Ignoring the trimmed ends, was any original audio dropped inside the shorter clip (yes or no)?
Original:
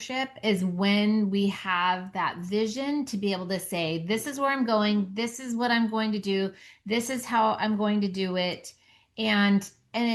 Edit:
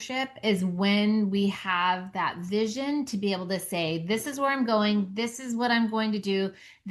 no